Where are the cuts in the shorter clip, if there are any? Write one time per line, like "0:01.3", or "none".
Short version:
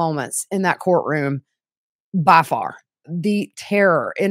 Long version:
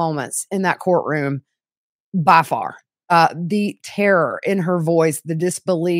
0:03.1